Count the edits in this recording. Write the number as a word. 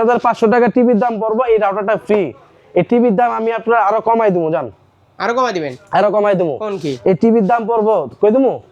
zero